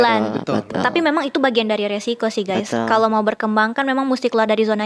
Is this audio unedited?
yes; 0 cuts

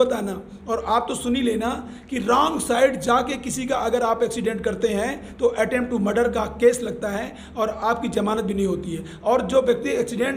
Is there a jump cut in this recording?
no; 0 cuts

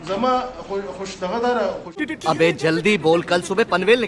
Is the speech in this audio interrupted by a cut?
yes; 1 cut; at 1.9 s

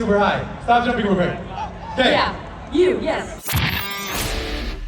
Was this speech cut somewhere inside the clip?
yes; 1 cut; at 3.4 s

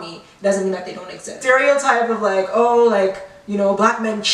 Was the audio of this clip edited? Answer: yes; 1 cut; at 1.3 s

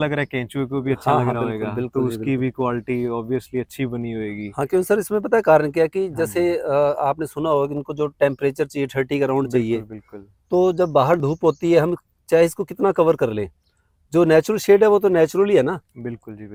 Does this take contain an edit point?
no; 0 cuts

